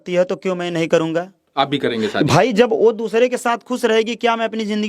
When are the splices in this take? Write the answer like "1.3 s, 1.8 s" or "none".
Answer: 1.4 s